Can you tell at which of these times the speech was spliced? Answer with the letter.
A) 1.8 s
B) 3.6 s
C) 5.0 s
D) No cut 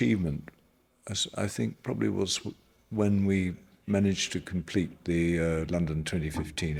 D